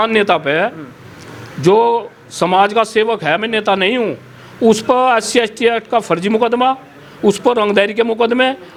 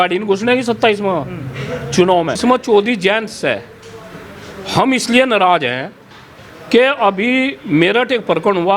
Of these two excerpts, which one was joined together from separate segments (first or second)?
second